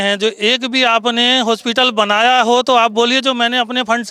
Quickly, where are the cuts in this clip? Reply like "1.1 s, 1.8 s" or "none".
none